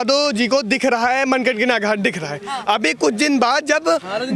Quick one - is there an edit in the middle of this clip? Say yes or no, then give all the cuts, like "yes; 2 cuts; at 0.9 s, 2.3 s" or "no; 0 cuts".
no; 0 cuts